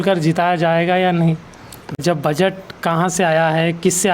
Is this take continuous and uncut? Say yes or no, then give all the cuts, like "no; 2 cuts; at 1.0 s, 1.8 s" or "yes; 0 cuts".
no; 1 cut; at 2.0 s